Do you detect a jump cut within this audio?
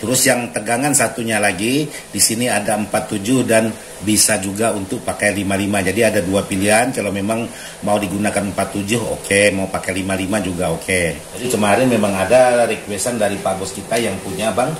yes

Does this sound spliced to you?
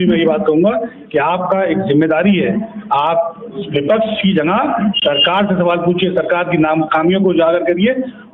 no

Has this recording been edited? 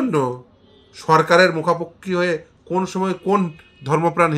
no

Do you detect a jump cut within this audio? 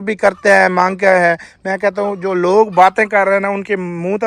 no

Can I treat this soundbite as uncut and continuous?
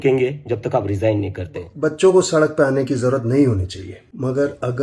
no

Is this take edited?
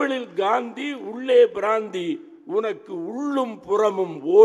no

